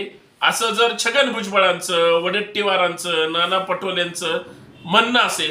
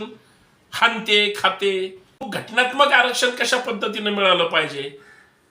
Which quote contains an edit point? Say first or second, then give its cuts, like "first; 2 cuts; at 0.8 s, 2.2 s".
second; 1 cut; at 2.3 s